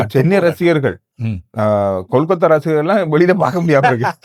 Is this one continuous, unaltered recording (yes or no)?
yes